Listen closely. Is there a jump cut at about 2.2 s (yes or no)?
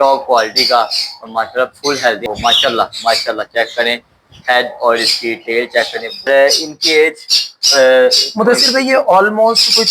yes